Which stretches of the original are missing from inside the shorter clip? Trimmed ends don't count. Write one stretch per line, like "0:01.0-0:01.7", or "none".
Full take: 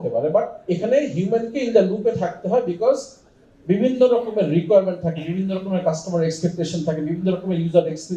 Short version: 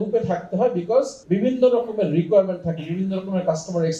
0:03.1-0:03.5